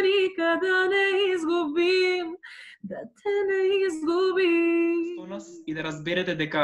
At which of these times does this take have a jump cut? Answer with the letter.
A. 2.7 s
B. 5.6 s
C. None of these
B